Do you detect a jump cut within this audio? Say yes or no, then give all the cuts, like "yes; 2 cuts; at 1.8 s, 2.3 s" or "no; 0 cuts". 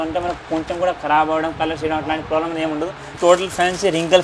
yes; 1 cut; at 3.1 s